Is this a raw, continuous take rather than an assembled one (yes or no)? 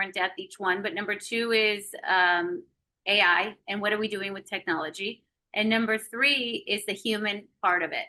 yes